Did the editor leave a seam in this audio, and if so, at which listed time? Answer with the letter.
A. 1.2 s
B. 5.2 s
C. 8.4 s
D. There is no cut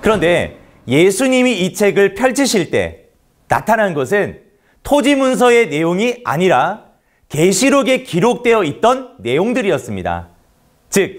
D